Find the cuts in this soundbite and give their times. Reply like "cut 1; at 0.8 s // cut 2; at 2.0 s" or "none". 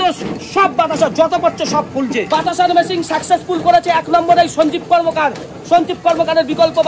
cut 1; at 2.2 s